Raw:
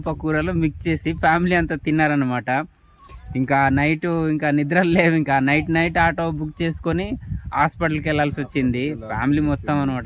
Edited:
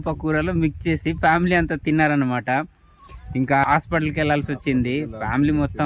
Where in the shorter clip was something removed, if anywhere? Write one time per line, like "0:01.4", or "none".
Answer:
0:03.6